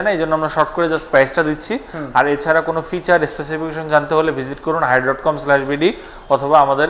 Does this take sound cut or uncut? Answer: uncut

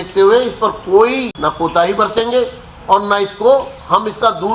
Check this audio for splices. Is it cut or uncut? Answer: cut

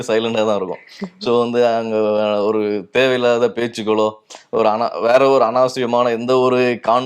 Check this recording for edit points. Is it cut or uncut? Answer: uncut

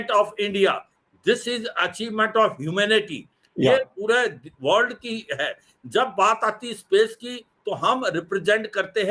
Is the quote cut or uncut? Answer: uncut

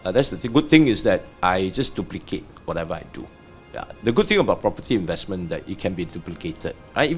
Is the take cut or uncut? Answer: uncut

